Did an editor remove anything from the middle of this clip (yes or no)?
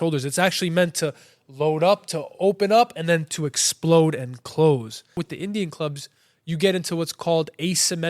yes